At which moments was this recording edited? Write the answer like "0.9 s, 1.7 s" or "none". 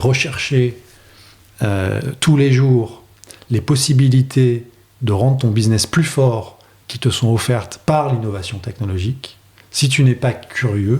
none